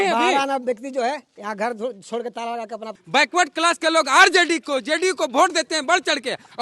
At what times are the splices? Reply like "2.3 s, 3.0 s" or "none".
3.0 s